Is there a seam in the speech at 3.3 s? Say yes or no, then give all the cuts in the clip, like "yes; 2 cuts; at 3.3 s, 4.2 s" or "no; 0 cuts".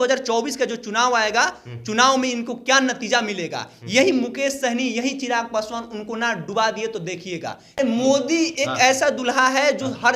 no; 1 cut; at 7.8 s